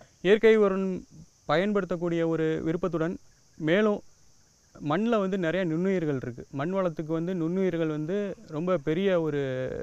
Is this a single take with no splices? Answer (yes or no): no